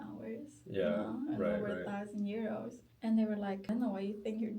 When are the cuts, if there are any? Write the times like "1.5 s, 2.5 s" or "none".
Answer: 2.8 s, 3.6 s